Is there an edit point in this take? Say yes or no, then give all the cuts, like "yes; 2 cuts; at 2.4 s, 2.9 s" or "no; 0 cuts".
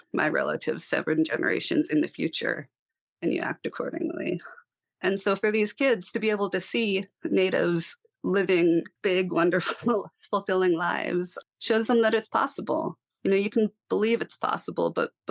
no; 0 cuts